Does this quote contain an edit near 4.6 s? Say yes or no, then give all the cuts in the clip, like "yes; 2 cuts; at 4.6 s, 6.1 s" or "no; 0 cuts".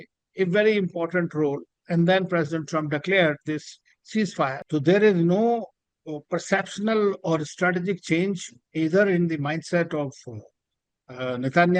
yes; 1 cut; at 4.6 s